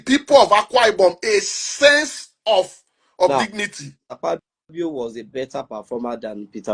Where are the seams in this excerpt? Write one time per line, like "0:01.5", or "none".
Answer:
0:04.1